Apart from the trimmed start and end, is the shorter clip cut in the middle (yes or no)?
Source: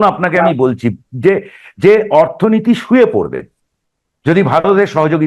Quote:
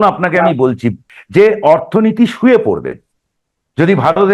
yes